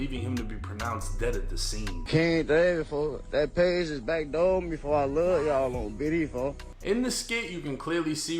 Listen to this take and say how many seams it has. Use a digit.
2